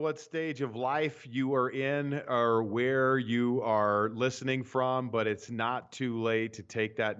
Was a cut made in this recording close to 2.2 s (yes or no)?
no